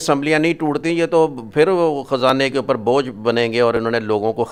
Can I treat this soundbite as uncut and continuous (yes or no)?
yes